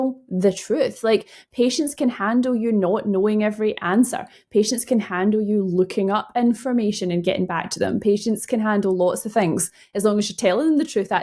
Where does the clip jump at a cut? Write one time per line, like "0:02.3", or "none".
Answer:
none